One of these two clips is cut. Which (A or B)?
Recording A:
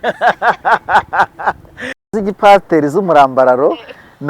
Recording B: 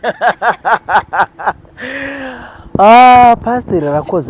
A